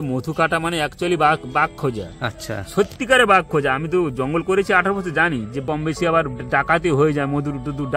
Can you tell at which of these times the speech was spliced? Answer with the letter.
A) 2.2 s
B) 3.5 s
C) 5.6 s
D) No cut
C